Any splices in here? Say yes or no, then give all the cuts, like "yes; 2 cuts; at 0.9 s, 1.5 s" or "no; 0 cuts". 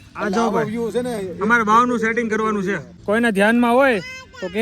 yes; 1 cut; at 2.9 s